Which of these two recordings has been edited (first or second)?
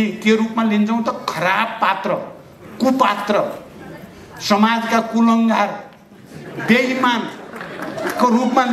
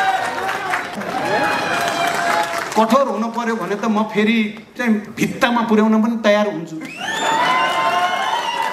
second